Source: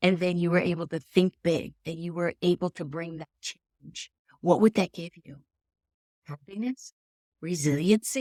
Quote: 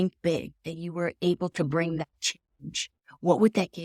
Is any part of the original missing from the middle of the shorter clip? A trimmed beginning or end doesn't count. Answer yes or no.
no